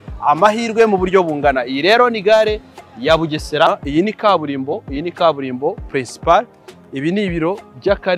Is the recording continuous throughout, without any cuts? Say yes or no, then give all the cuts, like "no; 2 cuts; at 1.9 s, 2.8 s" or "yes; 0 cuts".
no; 1 cut; at 3.7 s